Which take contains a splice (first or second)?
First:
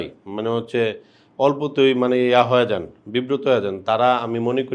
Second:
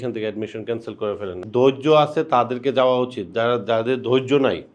second